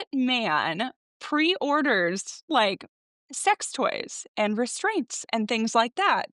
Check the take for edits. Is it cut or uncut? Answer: uncut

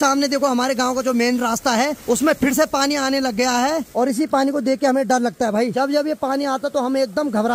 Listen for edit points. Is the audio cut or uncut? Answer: cut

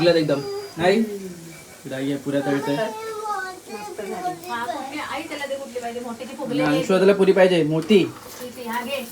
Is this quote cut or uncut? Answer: uncut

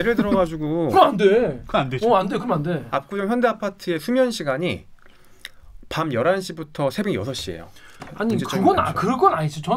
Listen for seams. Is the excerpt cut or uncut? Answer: cut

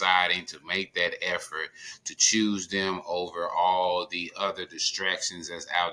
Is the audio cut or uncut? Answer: uncut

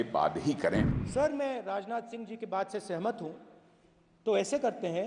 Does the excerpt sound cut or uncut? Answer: cut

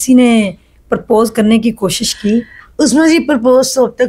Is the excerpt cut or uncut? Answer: uncut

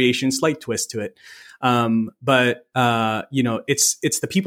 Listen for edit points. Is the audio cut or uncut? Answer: uncut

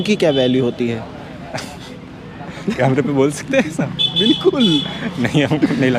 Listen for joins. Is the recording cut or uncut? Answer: uncut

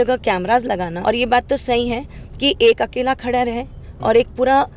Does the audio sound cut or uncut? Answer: cut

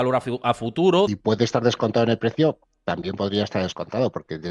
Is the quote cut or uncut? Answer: cut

